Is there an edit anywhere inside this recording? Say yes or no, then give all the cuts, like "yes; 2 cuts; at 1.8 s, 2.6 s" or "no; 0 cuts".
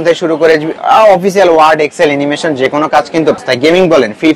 yes; 1 cut; at 3.4 s